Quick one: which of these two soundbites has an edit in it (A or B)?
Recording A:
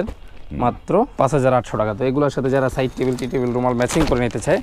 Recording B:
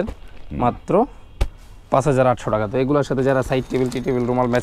A